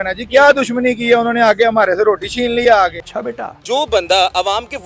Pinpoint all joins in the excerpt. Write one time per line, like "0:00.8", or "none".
0:03.3